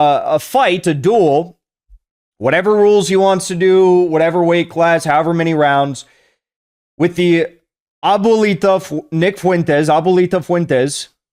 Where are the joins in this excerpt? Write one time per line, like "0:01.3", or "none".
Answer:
none